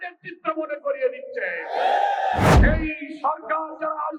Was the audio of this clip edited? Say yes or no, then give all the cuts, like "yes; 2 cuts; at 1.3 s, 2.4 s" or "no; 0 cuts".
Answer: yes; 1 cut; at 2.6 s